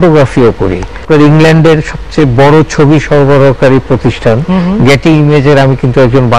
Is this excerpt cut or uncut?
uncut